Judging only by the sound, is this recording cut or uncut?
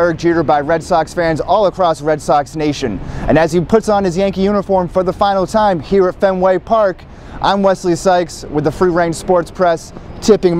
uncut